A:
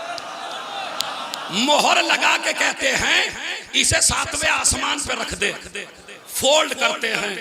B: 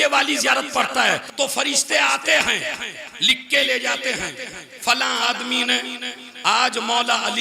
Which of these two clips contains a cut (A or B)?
B